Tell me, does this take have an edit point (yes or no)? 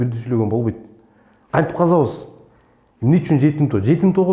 no